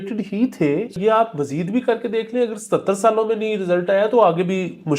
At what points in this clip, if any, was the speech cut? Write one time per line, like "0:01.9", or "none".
0:01.0

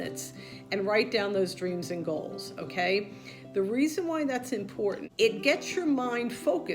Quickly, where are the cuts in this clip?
0:05.0

